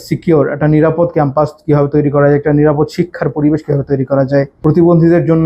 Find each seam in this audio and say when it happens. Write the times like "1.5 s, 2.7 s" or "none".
4.5 s